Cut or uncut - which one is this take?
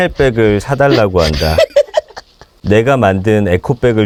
uncut